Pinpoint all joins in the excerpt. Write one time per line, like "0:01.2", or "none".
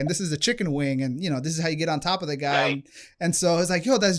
none